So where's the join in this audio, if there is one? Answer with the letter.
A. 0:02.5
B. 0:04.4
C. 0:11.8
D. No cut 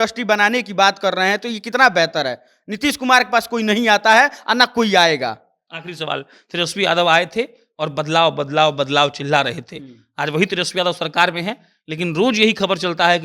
D